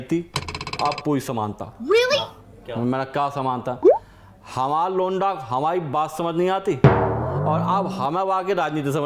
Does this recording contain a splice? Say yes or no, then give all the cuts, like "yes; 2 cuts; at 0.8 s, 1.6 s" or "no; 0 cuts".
no; 0 cuts